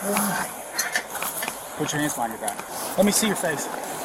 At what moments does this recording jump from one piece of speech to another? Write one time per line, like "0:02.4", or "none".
0:02.7